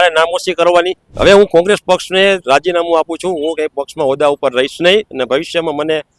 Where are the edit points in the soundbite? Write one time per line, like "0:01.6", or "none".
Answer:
0:01.0